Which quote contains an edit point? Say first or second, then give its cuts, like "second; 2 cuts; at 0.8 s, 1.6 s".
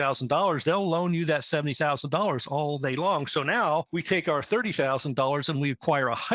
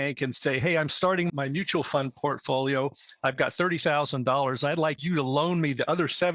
second; 2 cuts; at 1.3 s, 5.0 s